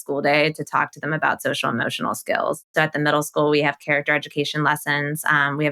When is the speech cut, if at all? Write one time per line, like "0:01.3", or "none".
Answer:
0:02.7